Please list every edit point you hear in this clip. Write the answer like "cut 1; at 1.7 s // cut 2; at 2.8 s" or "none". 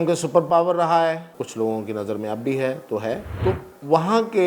cut 1; at 1.3 s // cut 2; at 3.3 s